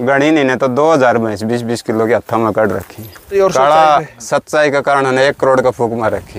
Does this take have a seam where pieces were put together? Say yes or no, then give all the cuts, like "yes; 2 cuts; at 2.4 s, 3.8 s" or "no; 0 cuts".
yes; 1 cut; at 3.3 s